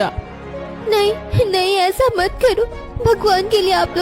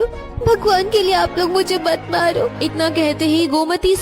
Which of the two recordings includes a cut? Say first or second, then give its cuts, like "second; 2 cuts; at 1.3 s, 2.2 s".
second; 1 cut; at 2.6 s